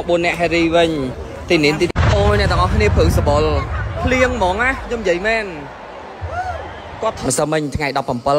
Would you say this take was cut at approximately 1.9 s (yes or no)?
yes